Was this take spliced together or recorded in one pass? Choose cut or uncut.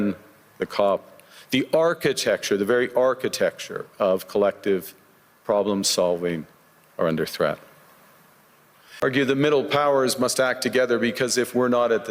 cut